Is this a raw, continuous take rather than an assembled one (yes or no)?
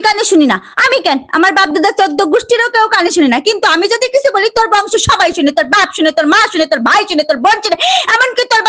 yes